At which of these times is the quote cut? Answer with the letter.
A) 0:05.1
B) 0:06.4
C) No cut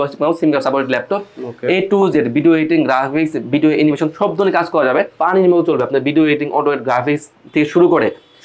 A